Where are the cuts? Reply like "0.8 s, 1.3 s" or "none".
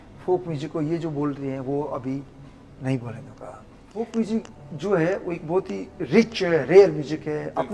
3.9 s